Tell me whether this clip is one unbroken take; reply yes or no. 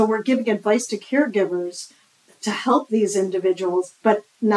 no